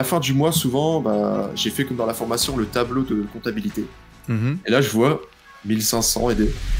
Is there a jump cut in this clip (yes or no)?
no